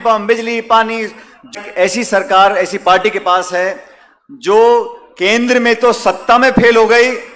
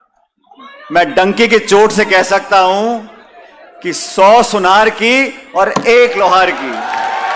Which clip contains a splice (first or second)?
first